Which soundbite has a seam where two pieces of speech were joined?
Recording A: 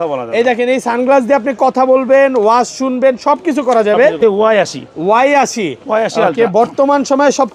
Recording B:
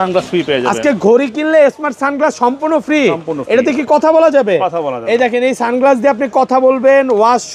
A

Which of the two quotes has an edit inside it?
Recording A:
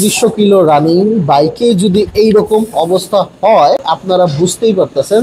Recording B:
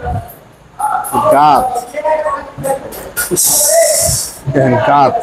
A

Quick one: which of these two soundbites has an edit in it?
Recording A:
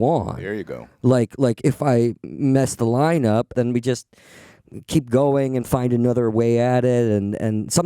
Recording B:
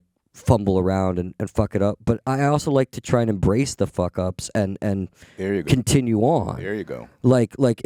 A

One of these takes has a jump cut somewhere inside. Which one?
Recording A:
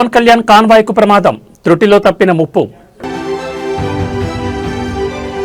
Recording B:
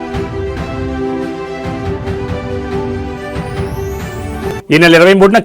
B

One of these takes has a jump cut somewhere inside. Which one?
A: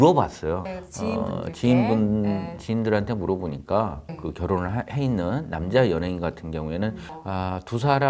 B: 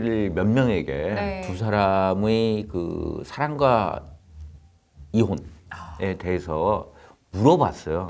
A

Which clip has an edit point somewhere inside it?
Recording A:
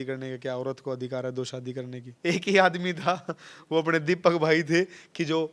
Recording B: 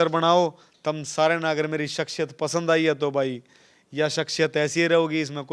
A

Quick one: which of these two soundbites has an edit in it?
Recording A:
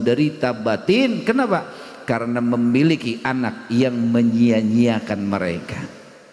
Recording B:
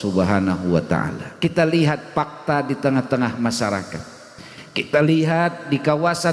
B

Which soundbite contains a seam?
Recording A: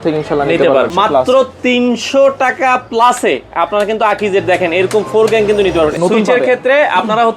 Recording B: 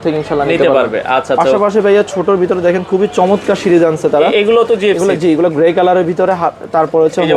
A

